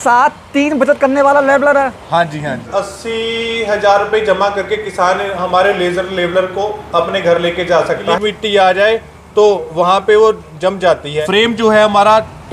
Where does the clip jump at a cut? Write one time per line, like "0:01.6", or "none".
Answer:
0:02.7
0:08.2
0:11.1